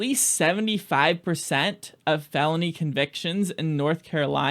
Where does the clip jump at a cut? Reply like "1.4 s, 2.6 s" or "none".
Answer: none